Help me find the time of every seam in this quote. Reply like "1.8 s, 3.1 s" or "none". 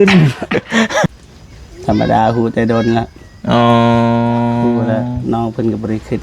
1.1 s